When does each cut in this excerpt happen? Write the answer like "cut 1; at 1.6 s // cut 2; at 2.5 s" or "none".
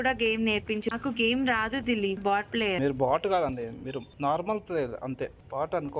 cut 1; at 0.9 s // cut 2; at 2.6 s